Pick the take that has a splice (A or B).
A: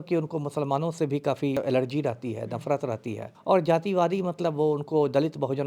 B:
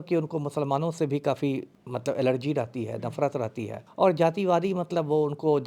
A